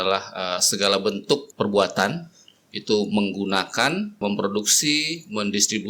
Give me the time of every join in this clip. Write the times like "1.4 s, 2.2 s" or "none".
1.5 s, 4.2 s

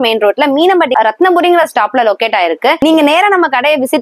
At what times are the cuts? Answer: 0.9 s, 2.8 s

